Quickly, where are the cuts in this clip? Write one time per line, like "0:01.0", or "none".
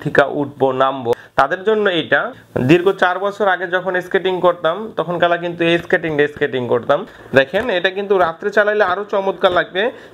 0:01.2
0:02.4
0:07.2